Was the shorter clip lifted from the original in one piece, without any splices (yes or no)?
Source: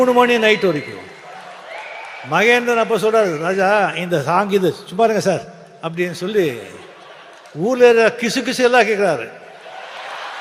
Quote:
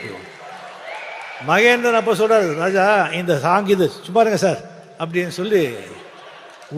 yes